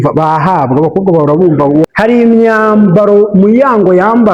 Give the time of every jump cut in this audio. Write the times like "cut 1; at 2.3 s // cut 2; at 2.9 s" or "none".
cut 1; at 1.8 s